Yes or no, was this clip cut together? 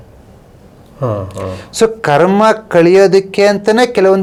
no